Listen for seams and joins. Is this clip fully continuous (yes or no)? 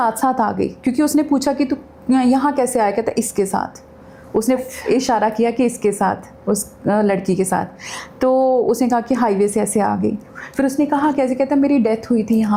yes